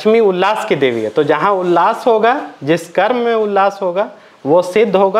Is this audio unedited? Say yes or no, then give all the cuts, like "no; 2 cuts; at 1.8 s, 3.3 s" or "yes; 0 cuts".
yes; 0 cuts